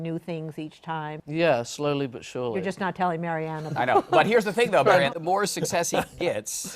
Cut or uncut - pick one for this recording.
uncut